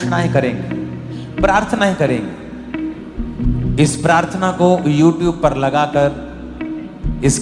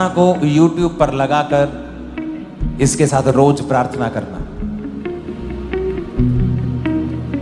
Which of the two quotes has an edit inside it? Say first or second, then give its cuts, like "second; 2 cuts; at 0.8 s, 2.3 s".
first; 2 cuts; at 1.2 s, 3.3 s